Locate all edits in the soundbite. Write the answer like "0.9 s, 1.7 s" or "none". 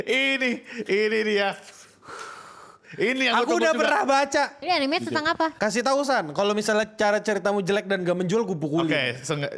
4.6 s, 5.5 s